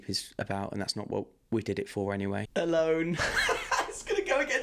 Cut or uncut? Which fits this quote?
cut